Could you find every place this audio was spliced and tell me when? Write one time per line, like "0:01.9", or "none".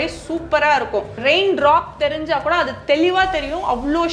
0:01.2

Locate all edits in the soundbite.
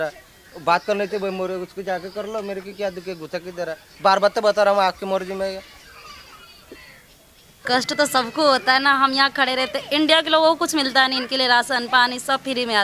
0:07.6

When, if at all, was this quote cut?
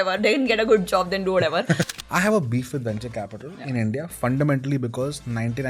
0:01.9

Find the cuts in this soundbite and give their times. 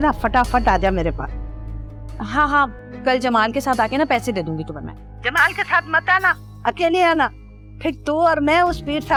none

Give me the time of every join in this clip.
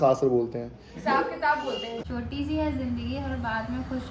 0:01.9

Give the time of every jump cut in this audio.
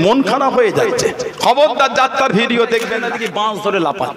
0:03.1

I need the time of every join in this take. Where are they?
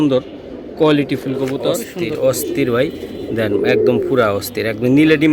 0:01.9

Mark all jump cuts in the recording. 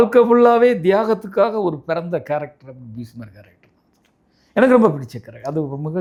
none

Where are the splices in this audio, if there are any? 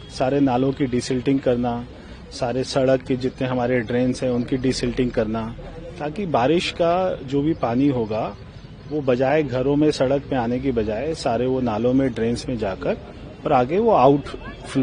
none

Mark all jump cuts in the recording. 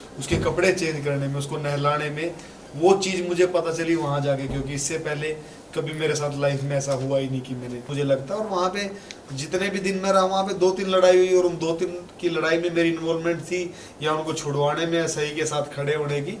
0:07.9

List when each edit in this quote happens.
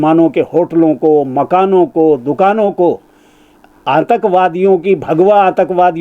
none

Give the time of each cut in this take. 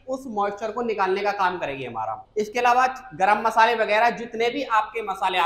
0:02.2

